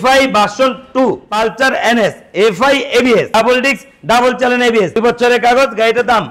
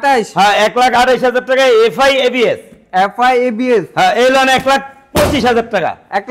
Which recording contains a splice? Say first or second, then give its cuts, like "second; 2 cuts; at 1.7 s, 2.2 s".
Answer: first; 3 cuts; at 1.3 s, 3.3 s, 4.9 s